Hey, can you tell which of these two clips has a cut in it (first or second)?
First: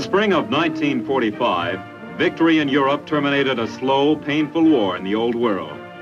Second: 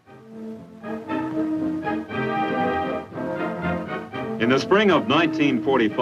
second